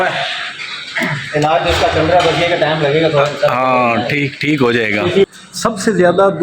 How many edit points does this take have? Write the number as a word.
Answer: one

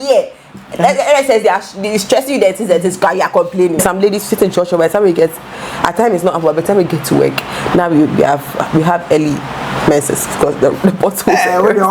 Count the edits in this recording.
one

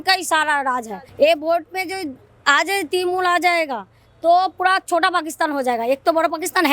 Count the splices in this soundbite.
one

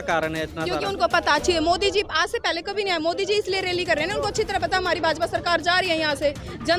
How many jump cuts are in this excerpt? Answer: zero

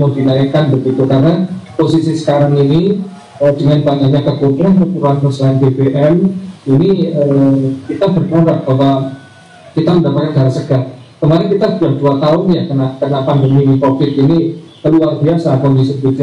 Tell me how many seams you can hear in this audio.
zero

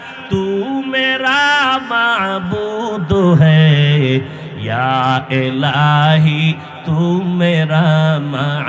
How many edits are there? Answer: zero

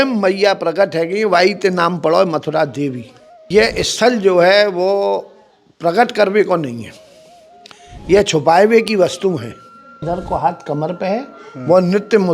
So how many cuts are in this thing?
two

